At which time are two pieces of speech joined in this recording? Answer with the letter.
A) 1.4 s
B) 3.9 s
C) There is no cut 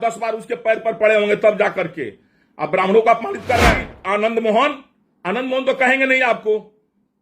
B